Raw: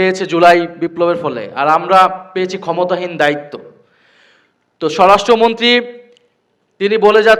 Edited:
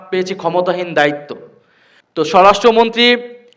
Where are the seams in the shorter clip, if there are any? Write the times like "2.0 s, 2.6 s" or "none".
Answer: 2.4 s